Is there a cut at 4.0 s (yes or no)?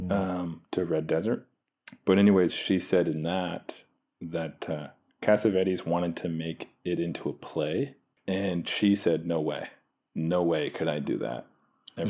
no